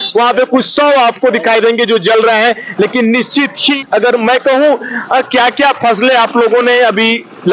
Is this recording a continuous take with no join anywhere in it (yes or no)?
no